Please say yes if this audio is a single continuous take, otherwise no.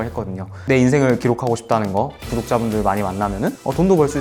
yes